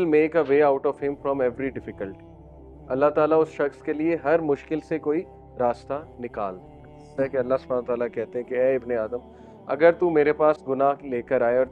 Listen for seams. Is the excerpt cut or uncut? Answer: cut